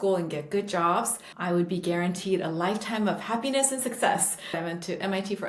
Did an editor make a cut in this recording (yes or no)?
yes